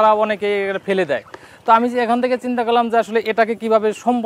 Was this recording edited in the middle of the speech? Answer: no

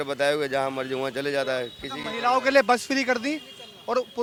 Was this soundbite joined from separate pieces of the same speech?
no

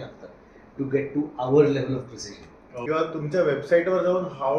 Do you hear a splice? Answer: yes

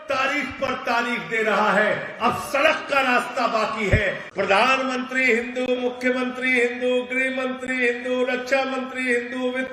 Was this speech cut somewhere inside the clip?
yes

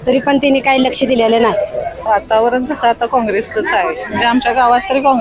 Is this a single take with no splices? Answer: no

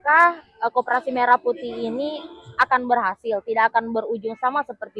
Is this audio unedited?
yes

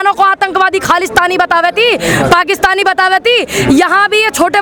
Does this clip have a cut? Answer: no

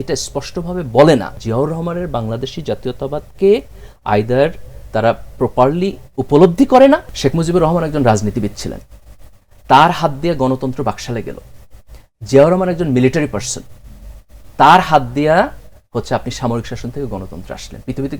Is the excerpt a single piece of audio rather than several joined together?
no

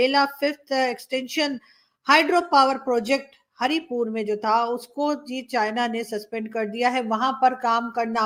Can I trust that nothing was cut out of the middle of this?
yes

